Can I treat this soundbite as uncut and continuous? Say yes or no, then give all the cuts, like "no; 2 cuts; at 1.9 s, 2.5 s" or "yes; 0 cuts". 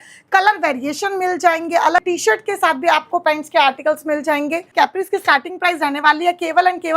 no; 2 cuts; at 2.0 s, 4.7 s